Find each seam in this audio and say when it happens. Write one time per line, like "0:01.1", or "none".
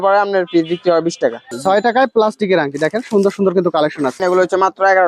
0:01.5
0:04.2